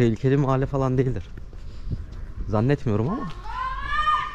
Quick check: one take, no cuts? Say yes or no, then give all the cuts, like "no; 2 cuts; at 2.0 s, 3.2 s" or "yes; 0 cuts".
yes; 0 cuts